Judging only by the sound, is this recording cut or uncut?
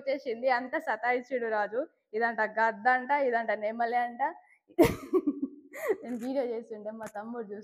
uncut